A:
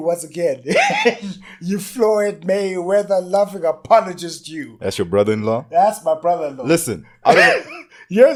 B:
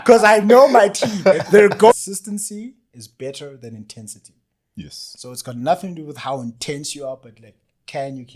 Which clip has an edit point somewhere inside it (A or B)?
B